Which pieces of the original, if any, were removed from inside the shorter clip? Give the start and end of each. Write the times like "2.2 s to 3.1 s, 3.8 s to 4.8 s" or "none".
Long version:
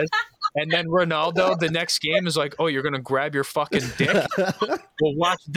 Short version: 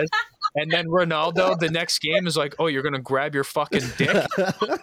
none

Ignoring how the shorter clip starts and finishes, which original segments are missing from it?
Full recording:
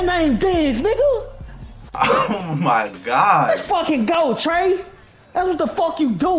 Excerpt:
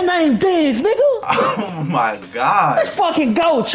1.2 s to 1.9 s

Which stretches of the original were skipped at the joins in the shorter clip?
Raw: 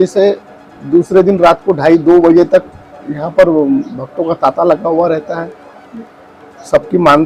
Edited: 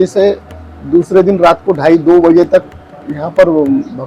none

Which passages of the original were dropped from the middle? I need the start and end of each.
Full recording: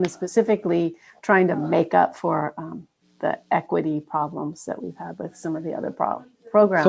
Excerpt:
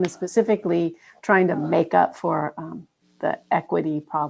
none

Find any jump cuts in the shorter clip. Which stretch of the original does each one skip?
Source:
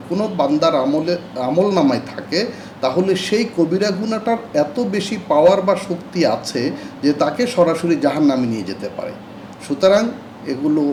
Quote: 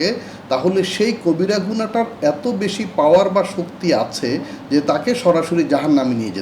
none

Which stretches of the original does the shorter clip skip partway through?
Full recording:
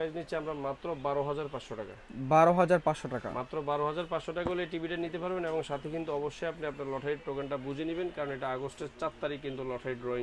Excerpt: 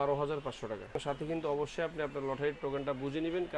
2.1 s to 5.6 s

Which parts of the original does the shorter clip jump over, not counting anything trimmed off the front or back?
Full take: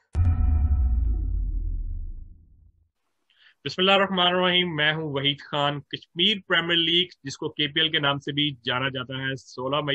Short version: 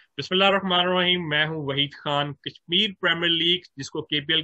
none

